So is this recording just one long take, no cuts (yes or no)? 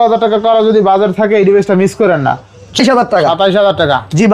no